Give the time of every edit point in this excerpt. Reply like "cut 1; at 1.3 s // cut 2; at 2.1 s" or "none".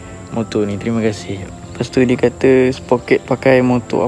cut 1; at 1.3 s

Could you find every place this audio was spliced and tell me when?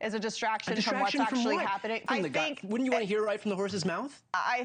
cut 1; at 2.0 s

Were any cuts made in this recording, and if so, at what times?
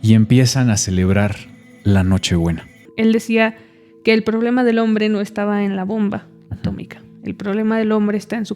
cut 1; at 2.8 s

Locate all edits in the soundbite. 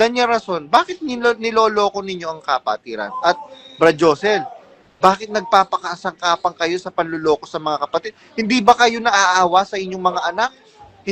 none

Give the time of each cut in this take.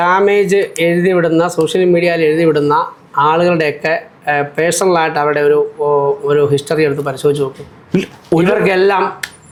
none

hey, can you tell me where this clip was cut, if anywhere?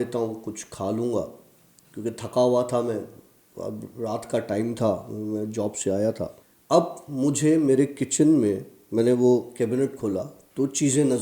cut 1; at 6.5 s

